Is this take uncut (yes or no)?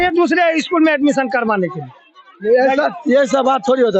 yes